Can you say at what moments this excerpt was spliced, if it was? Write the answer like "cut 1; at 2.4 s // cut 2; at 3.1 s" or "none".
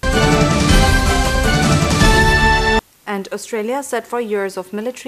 none